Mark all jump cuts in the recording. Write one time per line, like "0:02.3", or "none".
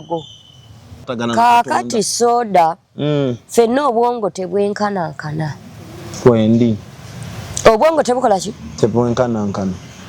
0:01.1